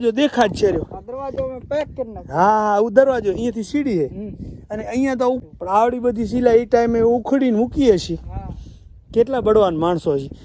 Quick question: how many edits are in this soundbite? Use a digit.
1